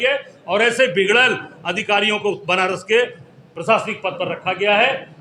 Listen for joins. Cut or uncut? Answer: uncut